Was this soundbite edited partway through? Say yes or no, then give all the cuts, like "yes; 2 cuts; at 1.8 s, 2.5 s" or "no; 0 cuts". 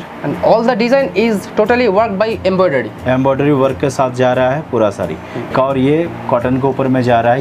yes; 1 cut; at 5.5 s